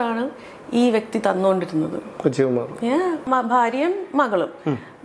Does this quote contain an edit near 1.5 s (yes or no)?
no